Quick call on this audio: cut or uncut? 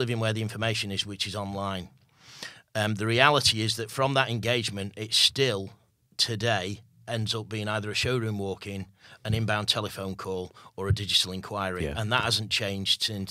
uncut